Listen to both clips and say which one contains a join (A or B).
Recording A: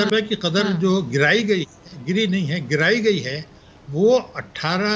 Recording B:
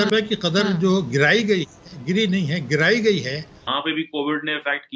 B